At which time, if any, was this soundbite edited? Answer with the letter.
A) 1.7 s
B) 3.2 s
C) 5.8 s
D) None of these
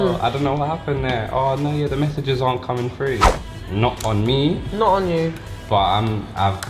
B